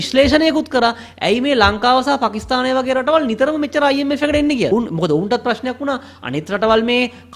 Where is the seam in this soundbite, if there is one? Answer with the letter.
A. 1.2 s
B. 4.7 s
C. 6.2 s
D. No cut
B